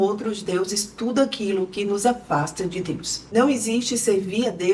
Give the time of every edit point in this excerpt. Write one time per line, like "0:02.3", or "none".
0:03.2